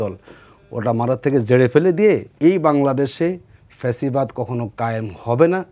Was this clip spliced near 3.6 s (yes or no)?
no